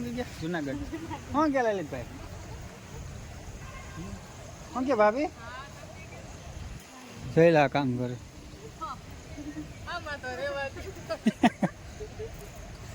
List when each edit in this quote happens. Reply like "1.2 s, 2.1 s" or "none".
none